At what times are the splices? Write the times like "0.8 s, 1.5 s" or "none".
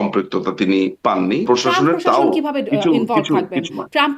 1.4 s

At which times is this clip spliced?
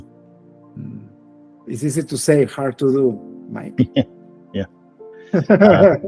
1.2 s

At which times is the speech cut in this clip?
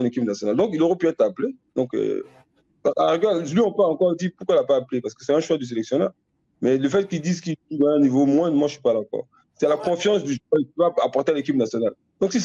none

